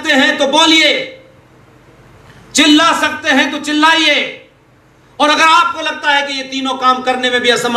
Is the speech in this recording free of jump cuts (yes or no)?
yes